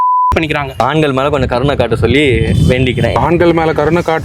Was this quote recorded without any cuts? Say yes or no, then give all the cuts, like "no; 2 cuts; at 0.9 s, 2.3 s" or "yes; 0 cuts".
no; 2 cuts; at 0.8 s, 3.2 s